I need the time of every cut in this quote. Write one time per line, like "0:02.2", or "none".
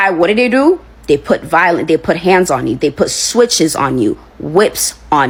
none